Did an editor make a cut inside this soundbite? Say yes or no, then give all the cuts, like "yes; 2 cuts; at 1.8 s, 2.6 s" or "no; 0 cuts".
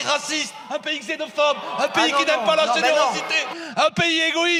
no; 0 cuts